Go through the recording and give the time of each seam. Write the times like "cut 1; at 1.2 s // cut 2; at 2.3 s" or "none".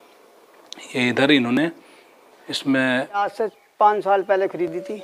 cut 1; at 3.2 s